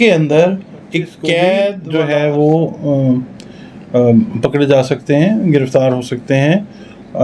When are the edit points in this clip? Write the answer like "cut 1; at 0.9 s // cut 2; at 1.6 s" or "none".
cut 1; at 1.8 s